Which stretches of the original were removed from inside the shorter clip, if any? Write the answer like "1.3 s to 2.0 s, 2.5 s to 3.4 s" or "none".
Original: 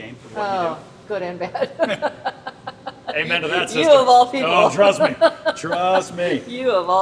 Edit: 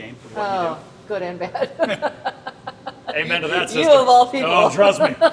none